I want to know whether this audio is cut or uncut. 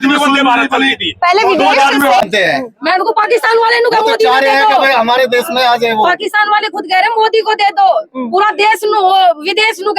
cut